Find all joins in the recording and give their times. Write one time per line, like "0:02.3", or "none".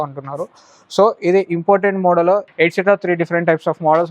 0:02.5